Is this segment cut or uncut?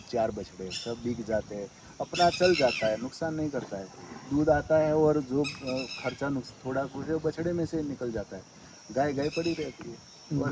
uncut